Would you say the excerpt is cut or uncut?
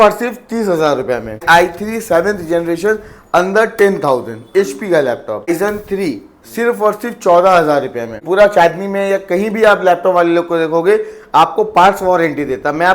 cut